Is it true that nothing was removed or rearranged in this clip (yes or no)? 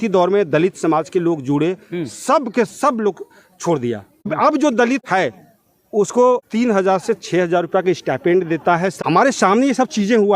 no